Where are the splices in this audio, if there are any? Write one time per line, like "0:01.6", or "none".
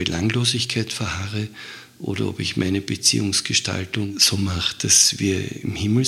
0:04.1